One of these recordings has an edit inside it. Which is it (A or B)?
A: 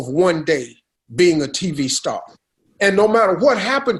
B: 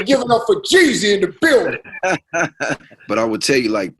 B